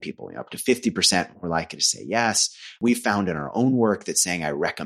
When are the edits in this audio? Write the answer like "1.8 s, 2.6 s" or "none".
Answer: 2.8 s